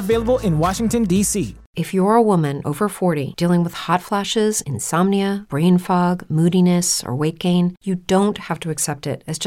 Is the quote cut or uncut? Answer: cut